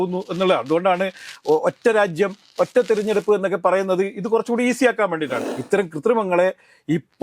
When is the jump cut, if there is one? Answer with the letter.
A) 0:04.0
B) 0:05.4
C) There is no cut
B